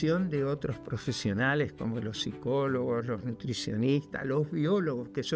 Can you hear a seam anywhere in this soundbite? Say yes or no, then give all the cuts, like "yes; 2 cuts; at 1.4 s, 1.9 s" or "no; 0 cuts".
no; 0 cuts